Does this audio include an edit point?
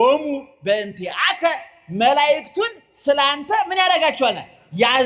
no; 0 cuts

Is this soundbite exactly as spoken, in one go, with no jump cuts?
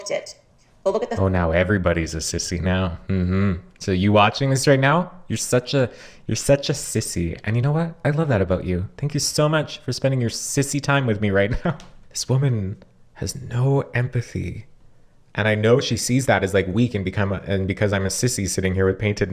no; 1 cut; at 11.9 s

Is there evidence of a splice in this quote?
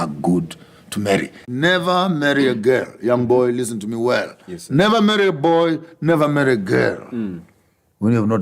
yes; 1 cut; at 1.4 s

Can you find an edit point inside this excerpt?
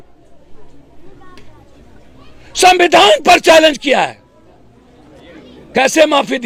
no; 0 cuts

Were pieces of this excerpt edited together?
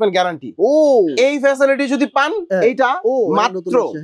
yes; 1 cut; at 2.4 s

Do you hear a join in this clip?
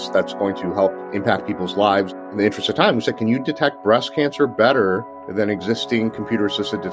yes; 2 cuts; at 1.0 s, 2.2 s

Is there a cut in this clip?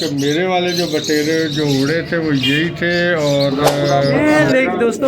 yes; 1 cut; at 4.1 s

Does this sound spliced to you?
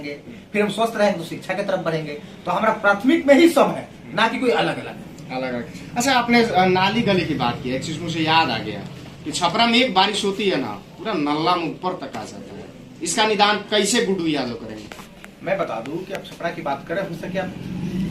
no; 0 cuts

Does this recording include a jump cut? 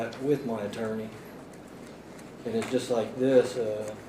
no; 0 cuts

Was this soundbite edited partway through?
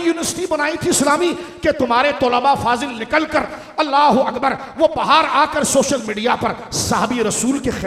no; 0 cuts

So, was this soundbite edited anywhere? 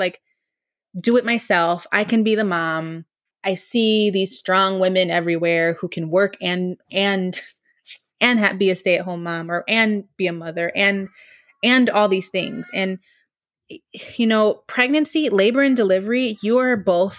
yes; 1 cut; at 3.3 s

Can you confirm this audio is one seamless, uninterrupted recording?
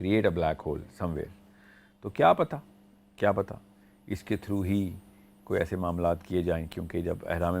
yes; 0 cuts

